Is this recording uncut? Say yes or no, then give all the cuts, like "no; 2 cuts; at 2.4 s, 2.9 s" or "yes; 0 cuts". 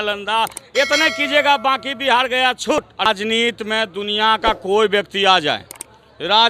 no; 1 cut; at 3.0 s